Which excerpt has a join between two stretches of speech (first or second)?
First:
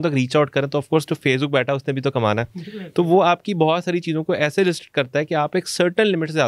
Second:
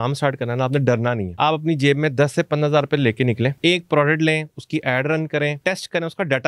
second